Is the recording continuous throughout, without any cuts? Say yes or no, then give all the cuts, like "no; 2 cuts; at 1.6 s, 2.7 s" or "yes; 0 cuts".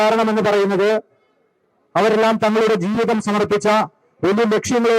yes; 0 cuts